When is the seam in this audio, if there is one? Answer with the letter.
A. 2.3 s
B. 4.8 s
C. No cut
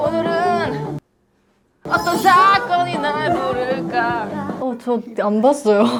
C